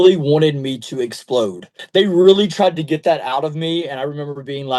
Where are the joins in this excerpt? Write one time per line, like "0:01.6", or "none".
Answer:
0:01.8